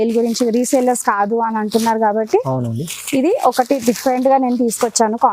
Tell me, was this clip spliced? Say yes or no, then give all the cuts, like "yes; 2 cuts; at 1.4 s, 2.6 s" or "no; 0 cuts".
no; 0 cuts